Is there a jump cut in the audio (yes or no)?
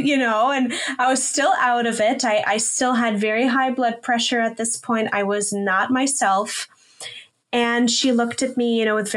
no